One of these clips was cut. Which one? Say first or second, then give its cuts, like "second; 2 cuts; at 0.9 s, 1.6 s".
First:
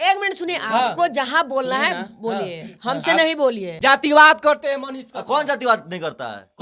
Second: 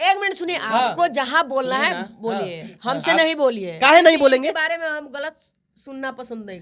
first; 1 cut; at 3.8 s